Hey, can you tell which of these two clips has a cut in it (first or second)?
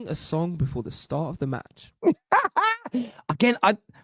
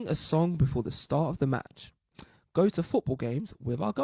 second